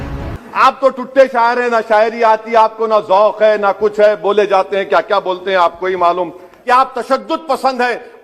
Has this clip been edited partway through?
yes; 1 cut; at 6.5 s

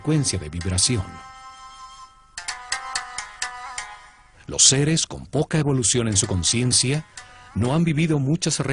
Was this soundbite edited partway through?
no; 0 cuts

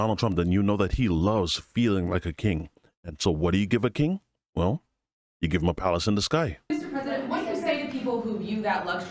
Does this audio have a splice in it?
yes; 1 cut; at 6.7 s

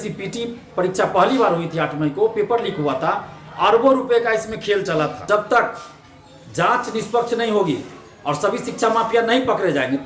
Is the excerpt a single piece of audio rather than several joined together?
no; 1 cut; at 5.2 s

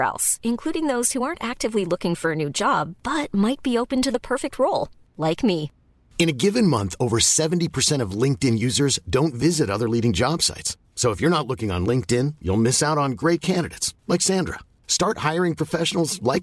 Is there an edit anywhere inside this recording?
no; 0 cuts

